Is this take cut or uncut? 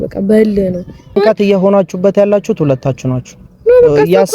cut